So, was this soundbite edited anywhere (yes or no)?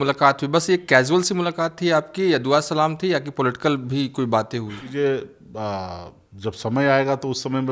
yes